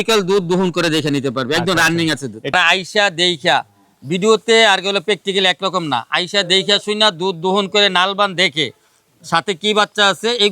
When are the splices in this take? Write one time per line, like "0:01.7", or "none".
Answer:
0:02.5